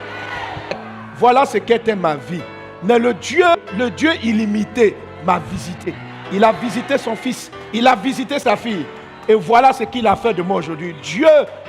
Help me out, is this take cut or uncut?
cut